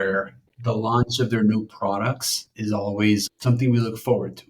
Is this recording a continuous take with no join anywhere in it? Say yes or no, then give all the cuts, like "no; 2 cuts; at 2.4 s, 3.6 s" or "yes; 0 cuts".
no; 1 cut; at 2.5 s